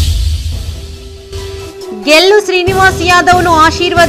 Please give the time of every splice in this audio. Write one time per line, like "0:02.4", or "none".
0:01.1